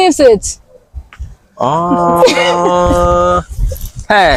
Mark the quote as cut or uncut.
uncut